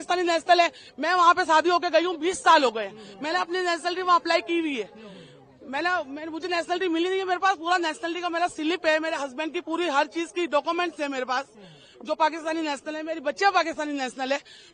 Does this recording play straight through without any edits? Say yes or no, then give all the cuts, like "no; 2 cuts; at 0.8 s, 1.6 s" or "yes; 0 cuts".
yes; 0 cuts